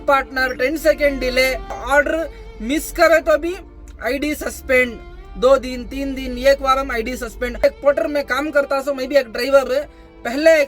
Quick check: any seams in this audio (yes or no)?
yes